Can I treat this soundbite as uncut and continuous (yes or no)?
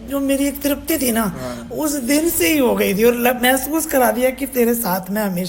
yes